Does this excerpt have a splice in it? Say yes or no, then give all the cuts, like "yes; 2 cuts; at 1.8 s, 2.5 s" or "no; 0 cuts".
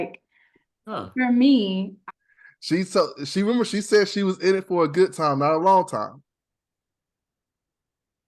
yes; 1 cut; at 2.0 s